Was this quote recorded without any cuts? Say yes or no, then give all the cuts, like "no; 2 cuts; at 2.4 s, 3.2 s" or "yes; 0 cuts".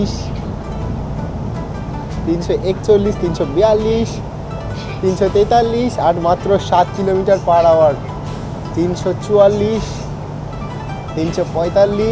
yes; 0 cuts